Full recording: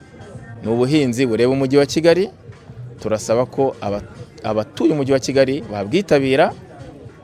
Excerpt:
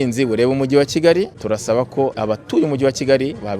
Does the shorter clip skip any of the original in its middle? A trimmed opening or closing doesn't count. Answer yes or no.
yes